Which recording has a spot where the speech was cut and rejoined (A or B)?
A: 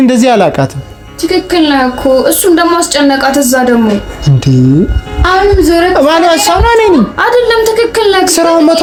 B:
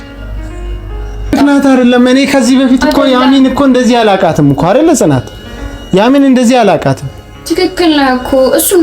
B